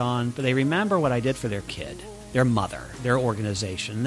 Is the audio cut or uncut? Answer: cut